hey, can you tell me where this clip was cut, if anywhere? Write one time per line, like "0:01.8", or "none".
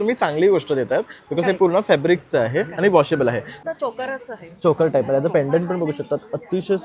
0:03.5